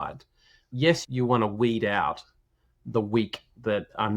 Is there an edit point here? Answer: yes; 1 cut; at 1.0 s

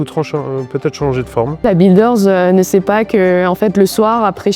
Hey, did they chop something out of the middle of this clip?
yes; 1 cut; at 1.5 s

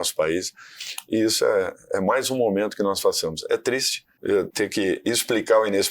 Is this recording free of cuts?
no; 1 cut; at 4.4 s

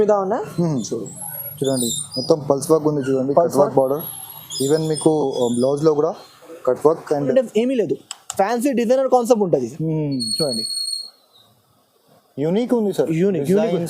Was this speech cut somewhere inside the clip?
yes; 1 cut; at 7.3 s

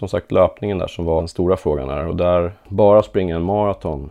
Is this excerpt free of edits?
no; 2 cuts; at 1.3 s, 2.6 s

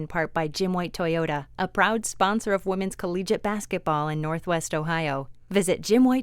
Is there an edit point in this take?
yes; 1 cut; at 5.3 s

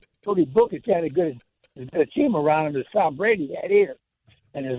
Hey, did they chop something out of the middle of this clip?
no; 0 cuts

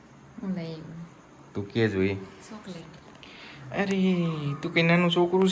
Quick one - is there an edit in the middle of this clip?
no; 0 cuts

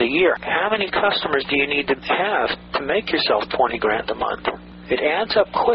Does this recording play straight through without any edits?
no; 1 cut; at 4.7 s

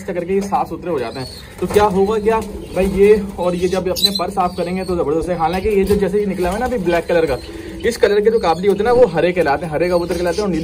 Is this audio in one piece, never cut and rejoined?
yes; 0 cuts

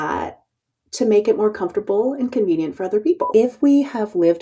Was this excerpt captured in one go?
no; 1 cut; at 3.2 s

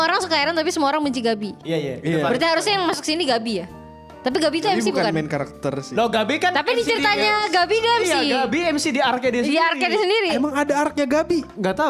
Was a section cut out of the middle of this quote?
no; 0 cuts

